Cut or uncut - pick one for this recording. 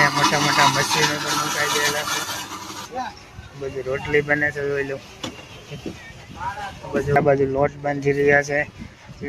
cut